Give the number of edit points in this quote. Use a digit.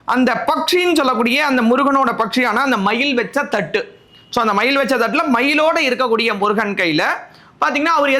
0